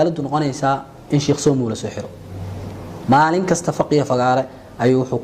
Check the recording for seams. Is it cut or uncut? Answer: uncut